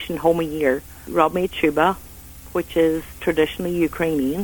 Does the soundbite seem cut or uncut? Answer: cut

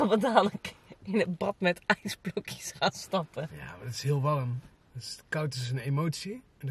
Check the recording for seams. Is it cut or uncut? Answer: uncut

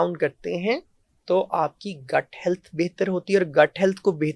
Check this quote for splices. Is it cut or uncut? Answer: uncut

